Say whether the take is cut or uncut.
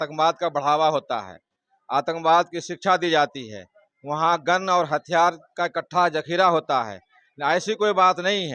uncut